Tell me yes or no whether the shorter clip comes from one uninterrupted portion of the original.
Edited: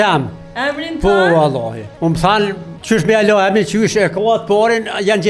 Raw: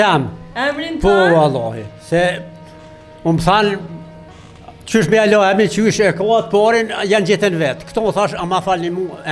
no